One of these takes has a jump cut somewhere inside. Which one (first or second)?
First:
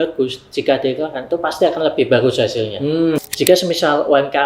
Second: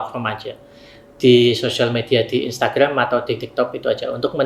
first